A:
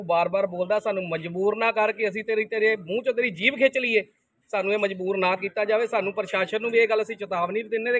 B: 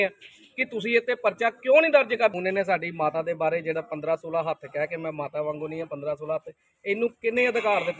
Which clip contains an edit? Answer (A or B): B